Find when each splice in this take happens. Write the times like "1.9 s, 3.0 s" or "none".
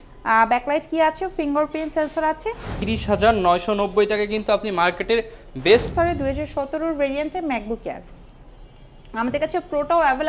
2.7 s, 5.9 s

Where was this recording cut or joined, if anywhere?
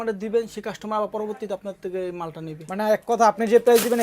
2.6 s

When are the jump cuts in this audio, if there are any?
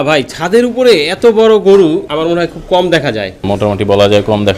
2.1 s, 3.4 s

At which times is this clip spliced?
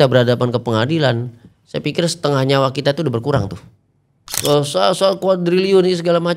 4.4 s

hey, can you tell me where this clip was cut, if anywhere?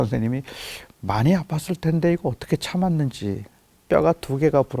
3.7 s

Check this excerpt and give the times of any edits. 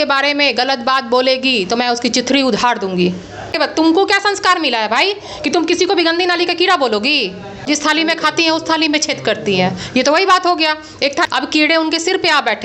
3.5 s, 7.7 s, 11.3 s

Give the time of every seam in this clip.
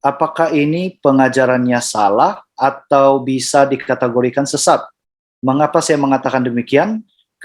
none

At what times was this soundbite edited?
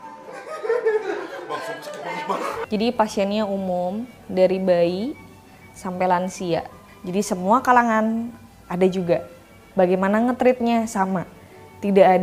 2.6 s

